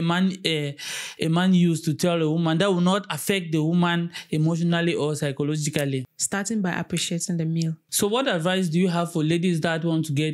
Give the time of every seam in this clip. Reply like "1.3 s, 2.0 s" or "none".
6.1 s, 7.8 s

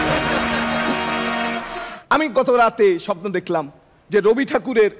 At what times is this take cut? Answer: 1.9 s

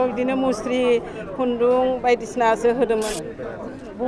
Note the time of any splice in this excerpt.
3.1 s

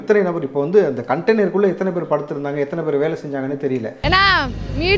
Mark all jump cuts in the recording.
none

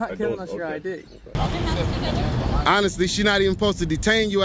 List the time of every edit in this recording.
1.3 s

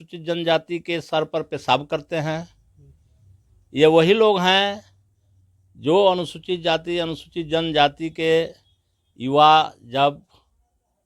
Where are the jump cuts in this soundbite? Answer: none

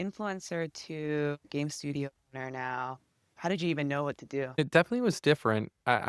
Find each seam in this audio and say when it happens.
1.5 s, 4.6 s

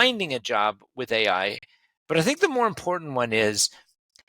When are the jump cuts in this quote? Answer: none

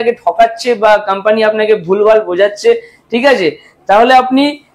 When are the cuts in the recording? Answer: none

